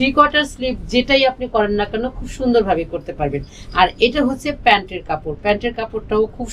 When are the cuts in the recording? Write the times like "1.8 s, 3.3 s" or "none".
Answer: none